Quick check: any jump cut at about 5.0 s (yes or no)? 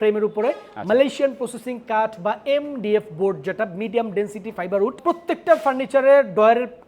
yes